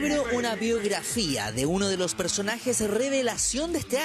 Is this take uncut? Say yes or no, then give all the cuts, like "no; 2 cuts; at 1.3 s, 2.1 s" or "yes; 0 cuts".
yes; 0 cuts